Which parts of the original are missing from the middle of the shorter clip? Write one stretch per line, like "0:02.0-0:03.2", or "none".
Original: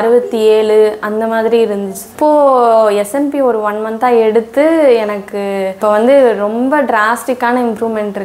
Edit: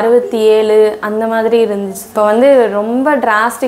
0:02.0-0:05.7

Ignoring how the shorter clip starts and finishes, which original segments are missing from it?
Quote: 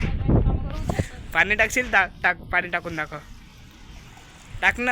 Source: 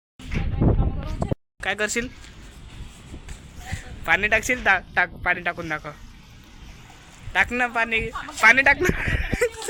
0:01.5-0:03.9

